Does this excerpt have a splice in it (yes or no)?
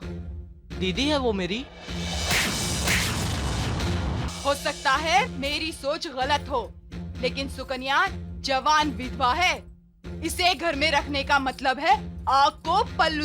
yes